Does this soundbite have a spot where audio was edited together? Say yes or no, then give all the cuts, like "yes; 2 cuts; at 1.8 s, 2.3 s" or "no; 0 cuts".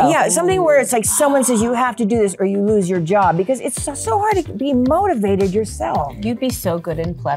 no; 0 cuts